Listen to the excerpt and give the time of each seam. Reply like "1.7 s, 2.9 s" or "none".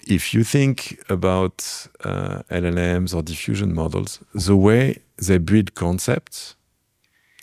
none